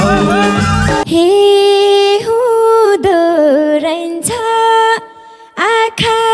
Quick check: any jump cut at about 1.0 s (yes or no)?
yes